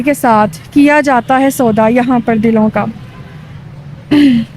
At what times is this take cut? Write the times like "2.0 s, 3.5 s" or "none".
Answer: none